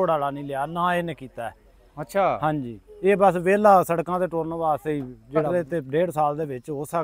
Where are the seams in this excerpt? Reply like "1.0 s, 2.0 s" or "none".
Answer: 5.5 s